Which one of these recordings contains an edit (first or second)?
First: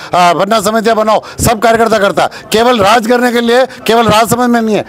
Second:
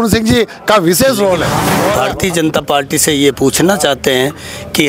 second